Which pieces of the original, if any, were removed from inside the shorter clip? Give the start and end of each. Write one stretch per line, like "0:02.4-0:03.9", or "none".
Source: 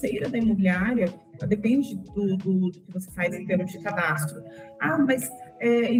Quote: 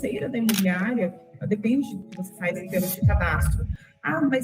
0:02.1-0:02.8